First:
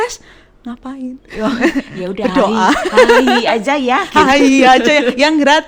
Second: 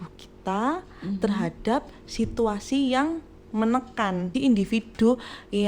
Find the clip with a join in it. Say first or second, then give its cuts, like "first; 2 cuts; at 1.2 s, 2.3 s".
second; 1 cut; at 4.3 s